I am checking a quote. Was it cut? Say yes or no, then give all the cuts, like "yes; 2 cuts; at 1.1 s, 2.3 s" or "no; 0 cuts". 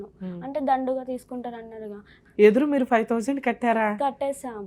yes; 1 cut; at 2.1 s